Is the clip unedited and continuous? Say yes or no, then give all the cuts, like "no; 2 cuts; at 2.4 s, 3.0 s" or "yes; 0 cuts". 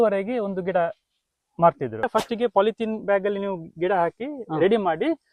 no; 1 cut; at 2.1 s